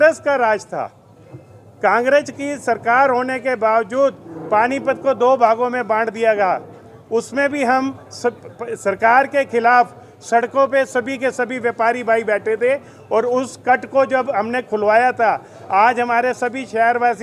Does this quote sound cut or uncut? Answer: uncut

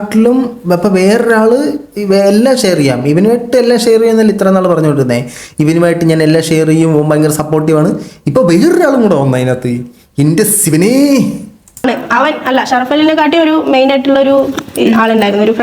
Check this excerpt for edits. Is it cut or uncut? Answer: cut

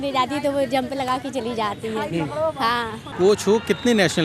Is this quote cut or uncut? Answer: cut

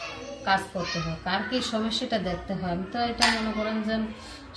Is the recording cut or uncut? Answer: uncut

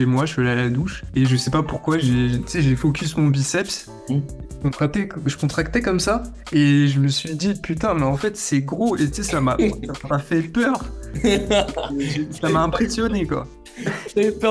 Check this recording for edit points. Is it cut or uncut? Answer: uncut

